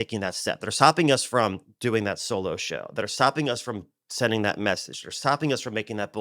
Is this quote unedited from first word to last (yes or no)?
yes